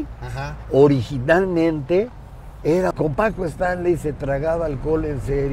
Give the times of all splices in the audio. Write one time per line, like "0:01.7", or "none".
0:02.9